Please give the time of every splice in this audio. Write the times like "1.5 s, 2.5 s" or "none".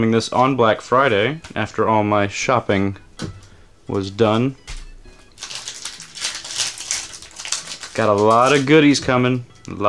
none